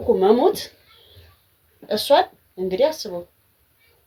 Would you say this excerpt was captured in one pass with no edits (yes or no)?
yes